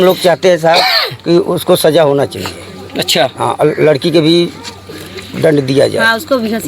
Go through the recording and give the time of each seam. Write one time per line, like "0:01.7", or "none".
none